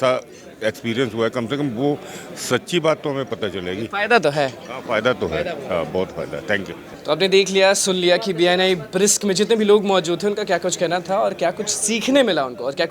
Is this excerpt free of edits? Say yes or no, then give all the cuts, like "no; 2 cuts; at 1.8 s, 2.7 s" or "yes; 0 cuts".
yes; 0 cuts